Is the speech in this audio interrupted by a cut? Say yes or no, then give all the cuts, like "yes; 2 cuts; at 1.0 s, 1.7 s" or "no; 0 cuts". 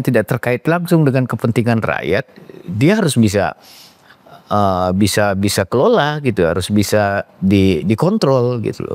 no; 0 cuts